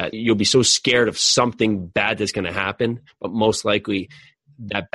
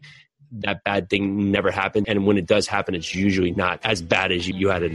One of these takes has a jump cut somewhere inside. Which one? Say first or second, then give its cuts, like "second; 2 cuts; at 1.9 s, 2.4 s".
second; 2 cuts; at 2.0 s, 3.8 s